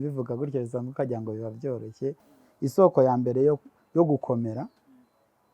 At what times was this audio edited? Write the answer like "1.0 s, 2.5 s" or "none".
2.2 s